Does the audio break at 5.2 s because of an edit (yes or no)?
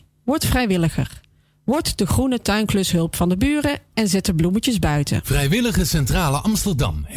yes